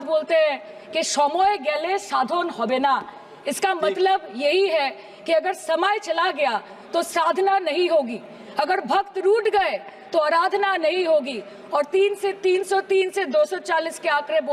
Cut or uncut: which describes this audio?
uncut